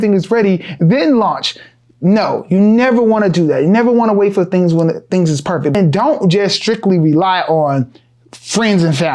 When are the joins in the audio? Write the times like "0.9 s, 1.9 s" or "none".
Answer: 5.7 s